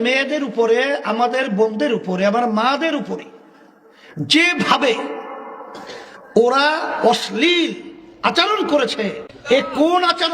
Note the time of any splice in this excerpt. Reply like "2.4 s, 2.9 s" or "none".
9.3 s